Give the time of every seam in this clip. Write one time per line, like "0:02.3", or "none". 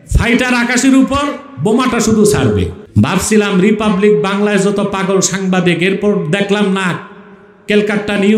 0:02.8